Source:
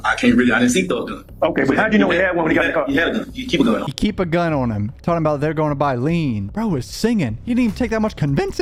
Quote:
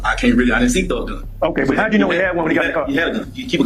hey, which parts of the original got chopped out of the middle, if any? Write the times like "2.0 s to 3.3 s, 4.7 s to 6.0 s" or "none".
none